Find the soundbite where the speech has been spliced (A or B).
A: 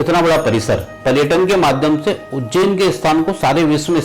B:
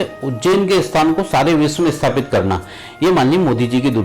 A